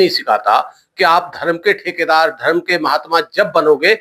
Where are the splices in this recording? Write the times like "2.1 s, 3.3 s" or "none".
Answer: none